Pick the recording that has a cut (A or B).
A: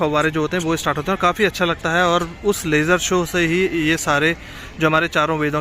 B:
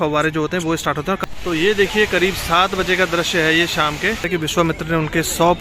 B